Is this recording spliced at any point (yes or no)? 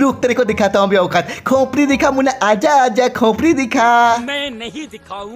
no